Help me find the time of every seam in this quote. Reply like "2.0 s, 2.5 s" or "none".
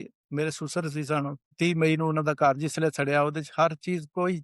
1.5 s